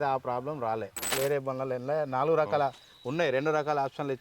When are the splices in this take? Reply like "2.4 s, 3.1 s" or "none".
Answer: 1.1 s

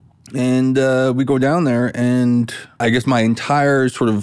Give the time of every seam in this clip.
2.8 s

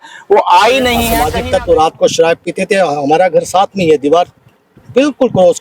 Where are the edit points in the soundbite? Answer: 1.2 s

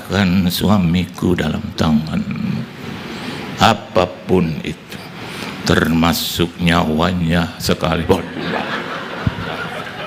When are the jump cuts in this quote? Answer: none

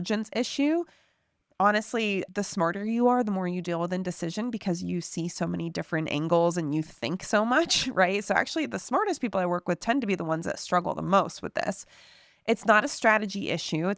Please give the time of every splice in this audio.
2.2 s

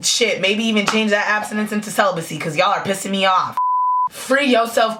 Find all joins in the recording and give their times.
3.6 s

